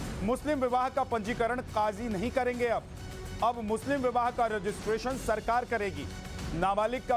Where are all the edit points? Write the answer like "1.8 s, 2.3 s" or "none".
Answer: 1.7 s

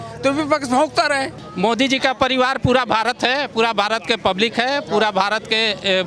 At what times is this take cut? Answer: 1.4 s

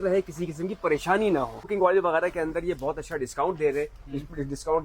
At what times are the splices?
1.7 s

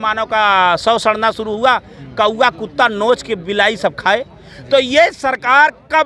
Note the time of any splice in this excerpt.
none

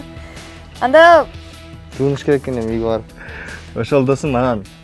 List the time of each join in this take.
3.1 s

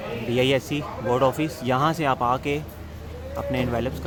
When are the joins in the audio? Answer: none

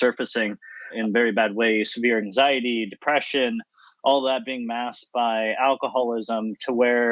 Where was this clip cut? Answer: 0.9 s

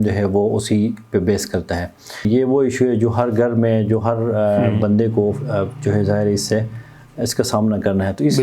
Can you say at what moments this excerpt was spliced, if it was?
2.2 s

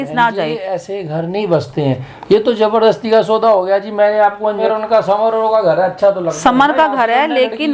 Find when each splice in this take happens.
4.6 s

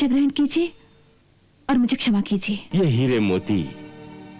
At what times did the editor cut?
2.6 s

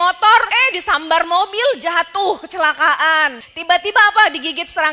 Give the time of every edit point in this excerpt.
3.4 s

